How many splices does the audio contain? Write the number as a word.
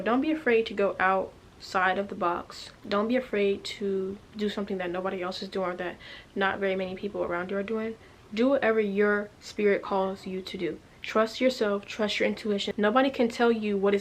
one